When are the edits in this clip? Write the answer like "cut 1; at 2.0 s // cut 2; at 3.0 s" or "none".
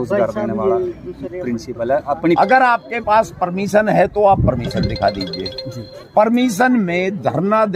cut 1; at 2.4 s